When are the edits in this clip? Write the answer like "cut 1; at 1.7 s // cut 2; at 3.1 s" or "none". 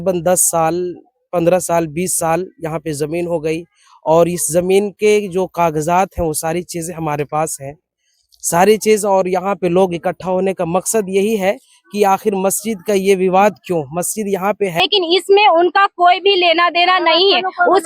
cut 1; at 14.8 s